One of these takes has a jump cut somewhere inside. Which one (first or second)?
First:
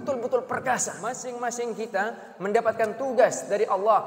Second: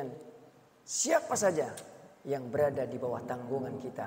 first